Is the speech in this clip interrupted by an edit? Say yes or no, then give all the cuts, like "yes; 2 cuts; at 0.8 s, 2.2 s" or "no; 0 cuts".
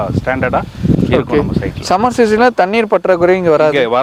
no; 0 cuts